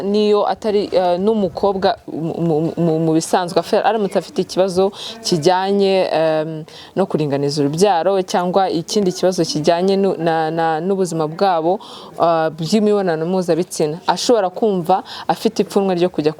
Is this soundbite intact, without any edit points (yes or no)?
yes